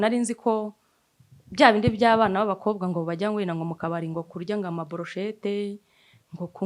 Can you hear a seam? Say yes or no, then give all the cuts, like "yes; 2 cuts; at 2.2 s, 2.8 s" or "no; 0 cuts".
no; 0 cuts